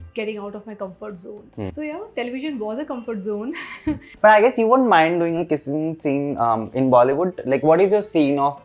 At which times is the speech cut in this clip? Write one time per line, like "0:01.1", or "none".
0:01.7
0:04.1

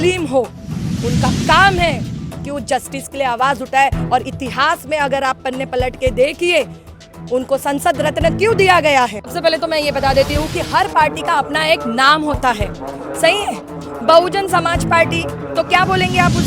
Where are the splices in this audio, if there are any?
0:09.2

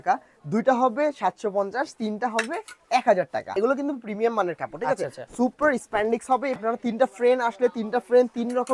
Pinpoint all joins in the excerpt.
0:03.5
0:06.6

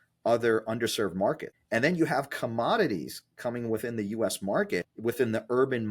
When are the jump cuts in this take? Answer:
0:01.5
0:04.9

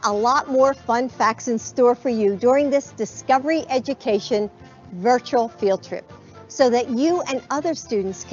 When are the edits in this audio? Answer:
none

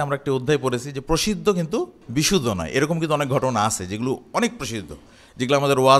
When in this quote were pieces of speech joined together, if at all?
0:02.0

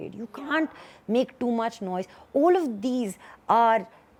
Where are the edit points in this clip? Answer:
none

